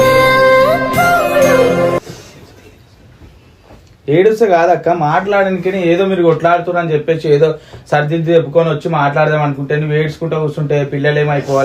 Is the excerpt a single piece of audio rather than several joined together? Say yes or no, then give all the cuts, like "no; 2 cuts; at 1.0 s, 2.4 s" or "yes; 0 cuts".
no; 1 cut; at 2.0 s